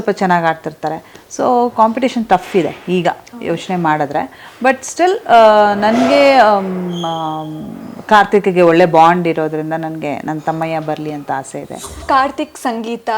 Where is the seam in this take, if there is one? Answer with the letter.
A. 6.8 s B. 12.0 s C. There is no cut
B